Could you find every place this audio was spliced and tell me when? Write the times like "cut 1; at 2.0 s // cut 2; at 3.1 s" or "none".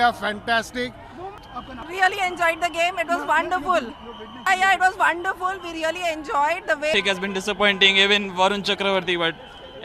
cut 1; at 1.4 s // cut 2; at 6.9 s